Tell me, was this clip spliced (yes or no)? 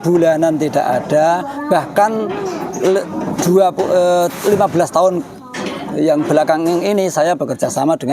no